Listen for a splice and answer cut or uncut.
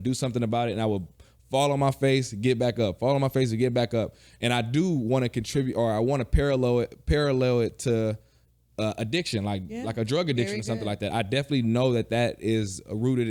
uncut